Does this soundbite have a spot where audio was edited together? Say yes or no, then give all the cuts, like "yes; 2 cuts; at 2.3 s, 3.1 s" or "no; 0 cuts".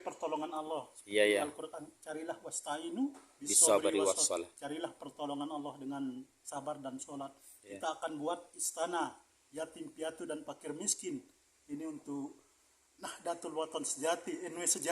no; 0 cuts